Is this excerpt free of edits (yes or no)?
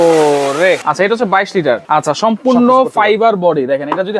no